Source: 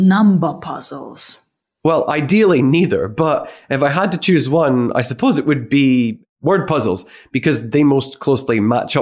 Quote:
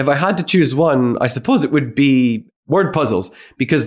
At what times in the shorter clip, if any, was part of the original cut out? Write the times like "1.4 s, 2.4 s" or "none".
none